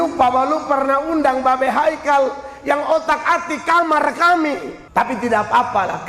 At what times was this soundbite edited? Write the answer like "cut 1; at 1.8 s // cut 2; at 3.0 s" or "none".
cut 1; at 4.7 s